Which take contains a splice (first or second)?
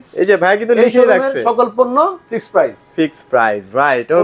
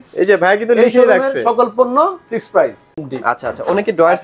second